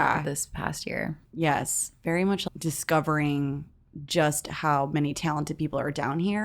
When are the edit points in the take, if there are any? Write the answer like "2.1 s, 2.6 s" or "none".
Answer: 1.2 s, 2.4 s